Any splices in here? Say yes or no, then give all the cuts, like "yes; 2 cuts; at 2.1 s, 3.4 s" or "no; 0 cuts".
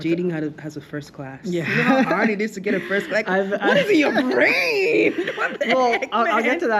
no; 0 cuts